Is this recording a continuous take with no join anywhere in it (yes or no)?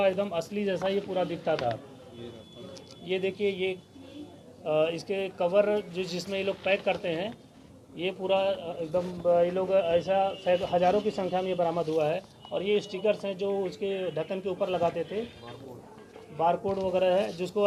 yes